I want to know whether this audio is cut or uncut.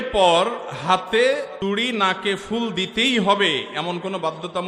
uncut